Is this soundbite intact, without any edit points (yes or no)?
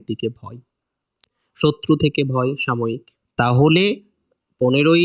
no